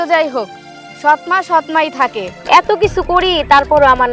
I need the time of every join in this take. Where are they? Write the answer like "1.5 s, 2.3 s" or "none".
2.3 s